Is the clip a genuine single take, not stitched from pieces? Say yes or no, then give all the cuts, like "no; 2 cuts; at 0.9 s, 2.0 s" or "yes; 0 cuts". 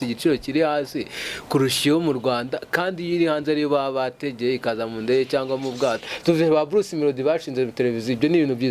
no; 1 cut; at 6.1 s